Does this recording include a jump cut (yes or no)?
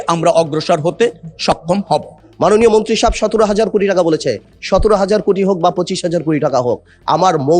yes